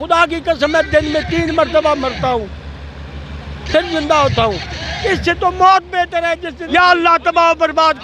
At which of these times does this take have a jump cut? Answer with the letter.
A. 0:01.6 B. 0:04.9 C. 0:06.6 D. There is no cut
C